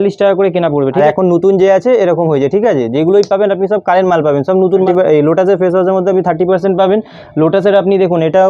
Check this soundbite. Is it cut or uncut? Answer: cut